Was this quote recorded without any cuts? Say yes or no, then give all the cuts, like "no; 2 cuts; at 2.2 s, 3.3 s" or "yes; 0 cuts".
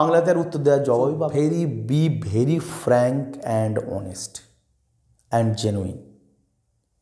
no; 1 cut; at 1.3 s